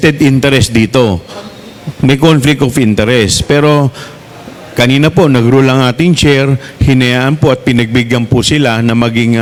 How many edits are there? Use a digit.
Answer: 0